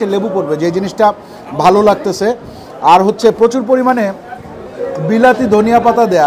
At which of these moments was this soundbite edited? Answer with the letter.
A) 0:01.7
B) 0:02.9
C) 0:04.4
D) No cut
D